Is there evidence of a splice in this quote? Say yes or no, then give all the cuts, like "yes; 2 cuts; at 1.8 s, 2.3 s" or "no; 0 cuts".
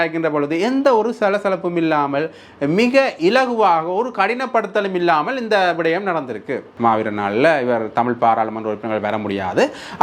yes; 1 cut; at 6.7 s